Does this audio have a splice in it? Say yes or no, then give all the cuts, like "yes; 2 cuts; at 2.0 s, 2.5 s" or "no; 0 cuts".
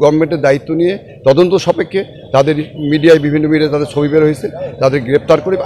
no; 0 cuts